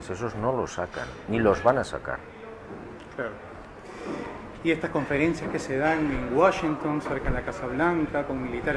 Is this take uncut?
no; 1 cut; at 6.6 s

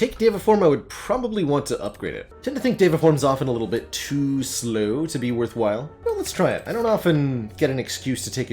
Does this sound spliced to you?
yes; 2 cuts; at 2.2 s, 5.9 s

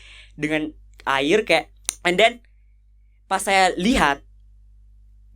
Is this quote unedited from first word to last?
no; 1 cut; at 1.8 s

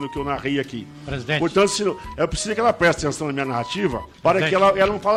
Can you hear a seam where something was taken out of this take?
no; 0 cuts

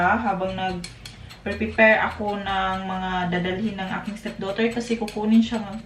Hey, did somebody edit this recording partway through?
no; 0 cuts

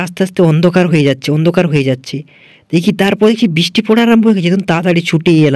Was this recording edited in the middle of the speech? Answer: no; 0 cuts

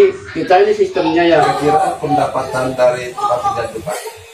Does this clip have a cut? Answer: yes; 1 cut; at 1.5 s

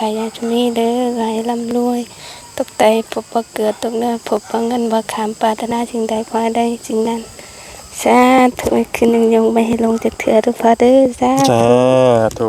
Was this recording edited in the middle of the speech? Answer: no; 0 cuts

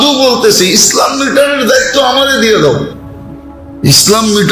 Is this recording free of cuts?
yes; 0 cuts

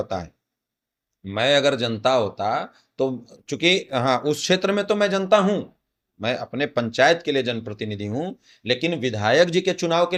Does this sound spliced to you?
no; 0 cuts

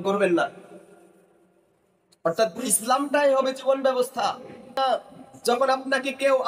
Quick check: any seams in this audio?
yes; 1 cut; at 4.8 s

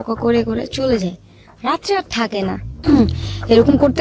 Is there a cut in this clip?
yes; 1 cut; at 2.7 s

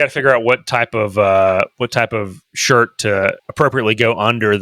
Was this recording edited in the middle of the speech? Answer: yes; 1 cut; at 3.4 s

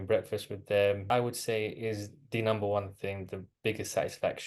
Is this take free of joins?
no; 1 cut; at 1.0 s

